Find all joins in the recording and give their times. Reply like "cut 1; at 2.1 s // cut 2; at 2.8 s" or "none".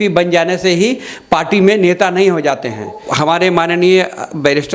cut 1; at 3.0 s